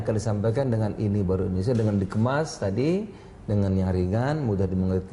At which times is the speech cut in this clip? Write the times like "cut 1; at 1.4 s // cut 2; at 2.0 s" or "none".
cut 1; at 1.4 s